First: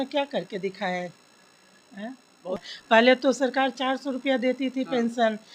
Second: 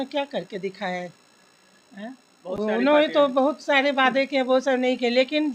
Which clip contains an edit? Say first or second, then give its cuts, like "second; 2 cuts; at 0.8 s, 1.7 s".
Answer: first; 1 cut; at 2.6 s